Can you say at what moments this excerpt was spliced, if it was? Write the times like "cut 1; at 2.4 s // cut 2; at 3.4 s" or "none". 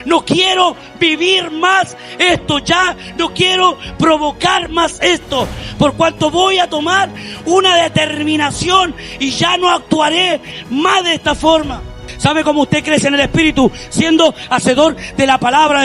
cut 1; at 12.1 s